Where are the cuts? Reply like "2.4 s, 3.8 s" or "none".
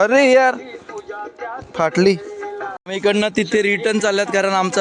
2.8 s